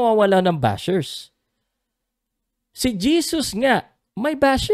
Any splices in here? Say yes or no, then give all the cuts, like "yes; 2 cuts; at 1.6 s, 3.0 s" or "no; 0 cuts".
no; 0 cuts